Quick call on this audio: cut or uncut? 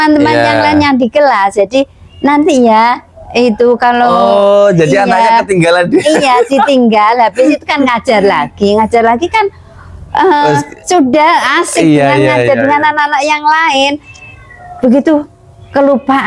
uncut